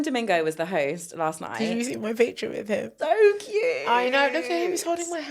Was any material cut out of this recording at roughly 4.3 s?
no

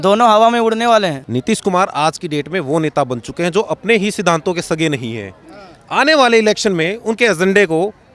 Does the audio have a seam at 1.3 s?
yes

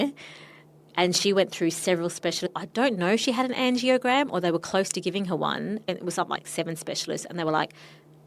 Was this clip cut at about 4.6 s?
no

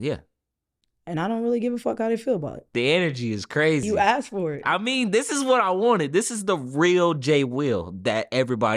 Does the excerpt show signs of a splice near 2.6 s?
yes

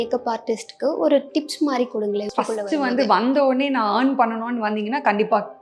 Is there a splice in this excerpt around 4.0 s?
no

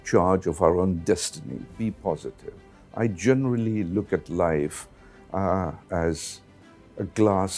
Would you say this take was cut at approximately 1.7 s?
yes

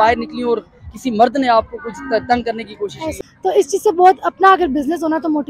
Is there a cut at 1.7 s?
no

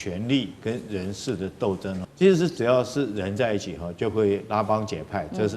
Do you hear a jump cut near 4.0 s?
no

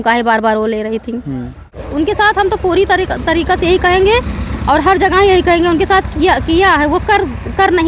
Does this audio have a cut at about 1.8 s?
yes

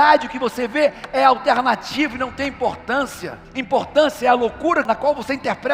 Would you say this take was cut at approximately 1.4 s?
no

